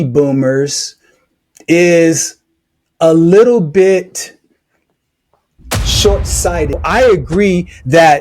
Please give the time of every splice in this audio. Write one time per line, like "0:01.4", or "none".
0:06.7